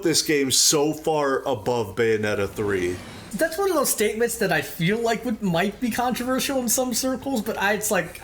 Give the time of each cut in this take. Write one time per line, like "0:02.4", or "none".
0:03.3